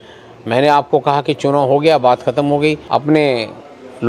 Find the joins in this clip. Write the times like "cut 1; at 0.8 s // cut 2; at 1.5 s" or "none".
cut 1; at 2.8 s